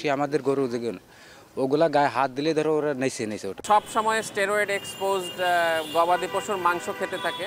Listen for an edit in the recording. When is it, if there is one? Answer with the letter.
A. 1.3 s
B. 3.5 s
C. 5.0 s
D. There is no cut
B